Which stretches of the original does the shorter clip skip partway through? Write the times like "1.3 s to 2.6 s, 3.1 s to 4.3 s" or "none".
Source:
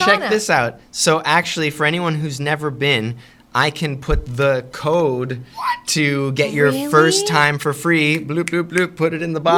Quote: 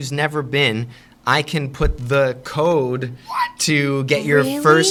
none